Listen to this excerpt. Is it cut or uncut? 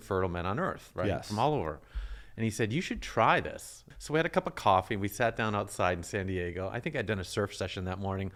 uncut